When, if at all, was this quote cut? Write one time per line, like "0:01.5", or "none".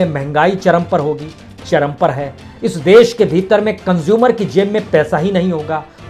none

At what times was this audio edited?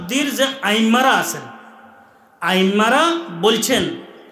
none

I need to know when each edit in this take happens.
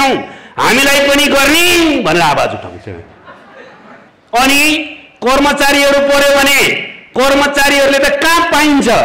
0:04.1

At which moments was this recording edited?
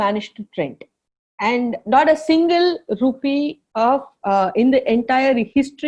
none

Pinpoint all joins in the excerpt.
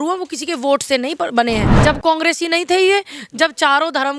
0:01.7

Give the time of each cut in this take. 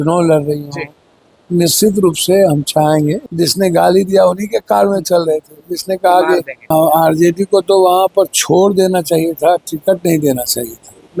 0:03.2
0:06.7

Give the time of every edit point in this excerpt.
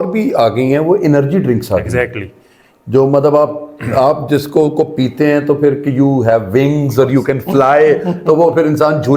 none

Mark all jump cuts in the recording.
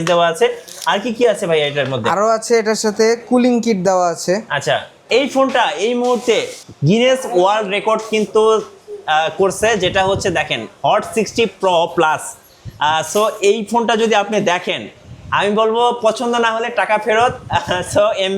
0:05.0

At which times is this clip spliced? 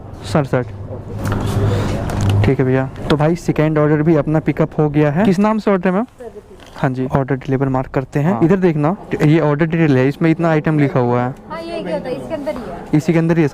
0:05.3
0:08.4

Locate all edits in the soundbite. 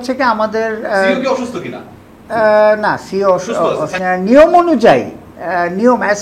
0:04.0

